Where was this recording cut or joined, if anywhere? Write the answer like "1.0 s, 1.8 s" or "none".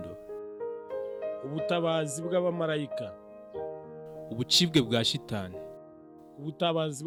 none

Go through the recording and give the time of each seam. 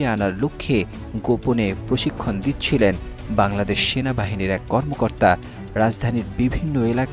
5.6 s

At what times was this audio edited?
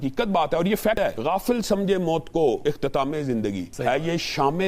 1.0 s, 2.6 s, 3.7 s

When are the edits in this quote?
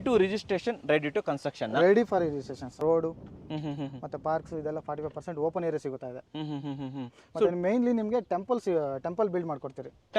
2.8 s

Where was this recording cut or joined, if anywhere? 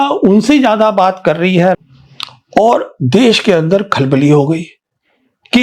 1.8 s

